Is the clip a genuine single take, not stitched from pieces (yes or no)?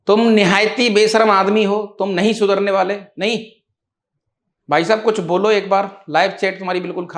yes